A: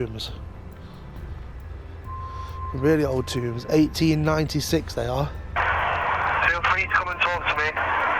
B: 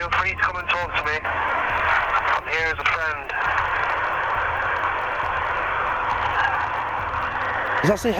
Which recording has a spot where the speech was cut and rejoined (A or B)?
A